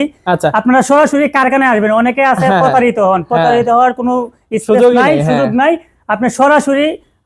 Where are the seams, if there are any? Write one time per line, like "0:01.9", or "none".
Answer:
none